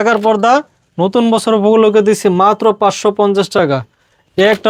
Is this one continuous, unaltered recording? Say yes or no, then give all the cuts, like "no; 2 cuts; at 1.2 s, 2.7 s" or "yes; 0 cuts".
yes; 0 cuts